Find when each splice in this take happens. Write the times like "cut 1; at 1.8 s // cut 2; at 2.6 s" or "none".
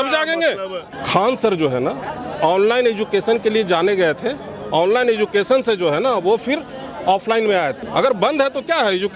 cut 1; at 0.9 s // cut 2; at 7.8 s